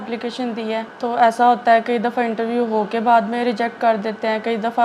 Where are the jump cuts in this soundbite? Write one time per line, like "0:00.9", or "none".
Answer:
0:00.9